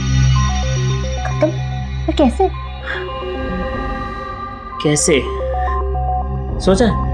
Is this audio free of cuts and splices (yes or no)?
yes